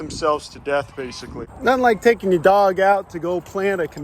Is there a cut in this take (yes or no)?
yes